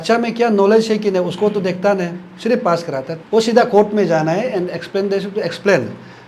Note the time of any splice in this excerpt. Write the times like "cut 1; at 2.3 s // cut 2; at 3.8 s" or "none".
cut 1; at 3.1 s